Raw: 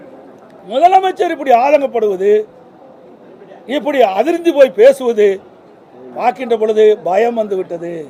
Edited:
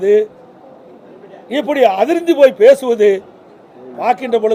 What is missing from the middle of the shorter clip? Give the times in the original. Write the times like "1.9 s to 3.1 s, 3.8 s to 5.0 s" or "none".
none